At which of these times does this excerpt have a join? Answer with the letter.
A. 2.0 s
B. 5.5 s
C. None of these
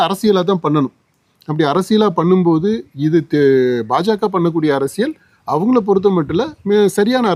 C